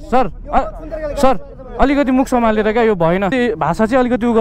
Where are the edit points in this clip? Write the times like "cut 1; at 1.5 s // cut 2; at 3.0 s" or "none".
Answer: cut 1; at 3.3 s